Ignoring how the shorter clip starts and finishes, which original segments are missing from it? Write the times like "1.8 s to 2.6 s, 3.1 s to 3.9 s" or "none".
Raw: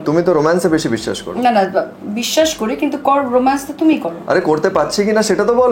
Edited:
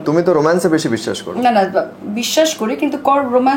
none